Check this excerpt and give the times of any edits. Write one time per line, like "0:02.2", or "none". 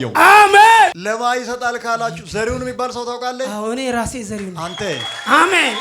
0:01.0